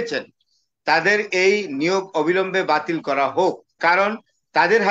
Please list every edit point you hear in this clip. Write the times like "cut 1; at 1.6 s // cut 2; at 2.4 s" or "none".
cut 1; at 3.7 s